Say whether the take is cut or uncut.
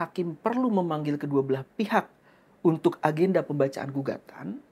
uncut